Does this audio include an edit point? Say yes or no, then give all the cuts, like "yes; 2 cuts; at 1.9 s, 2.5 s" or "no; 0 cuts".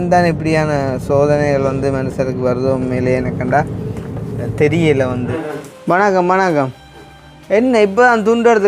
yes; 1 cut; at 5.3 s